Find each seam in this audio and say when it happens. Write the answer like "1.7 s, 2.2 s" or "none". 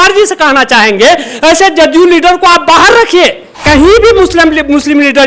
3.6 s